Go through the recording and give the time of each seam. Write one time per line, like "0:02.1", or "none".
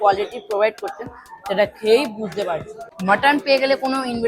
0:02.8